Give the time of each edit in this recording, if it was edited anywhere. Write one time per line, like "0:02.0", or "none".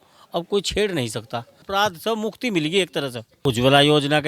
0:01.6
0:03.3